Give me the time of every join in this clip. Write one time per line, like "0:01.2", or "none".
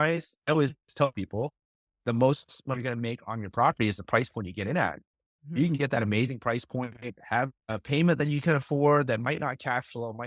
none